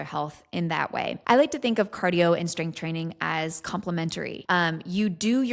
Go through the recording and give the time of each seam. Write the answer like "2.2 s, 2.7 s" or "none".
1.2 s, 4.4 s